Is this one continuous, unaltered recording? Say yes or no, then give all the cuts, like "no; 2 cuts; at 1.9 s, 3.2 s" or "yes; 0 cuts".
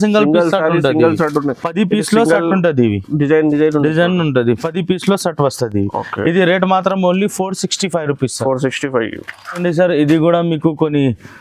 yes; 0 cuts